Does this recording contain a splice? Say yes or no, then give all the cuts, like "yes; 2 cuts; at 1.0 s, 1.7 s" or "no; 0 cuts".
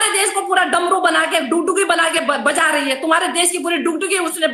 no; 0 cuts